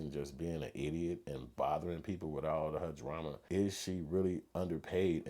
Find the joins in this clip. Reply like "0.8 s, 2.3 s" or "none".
3.4 s

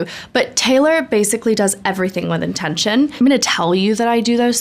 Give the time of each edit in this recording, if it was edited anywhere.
3.2 s

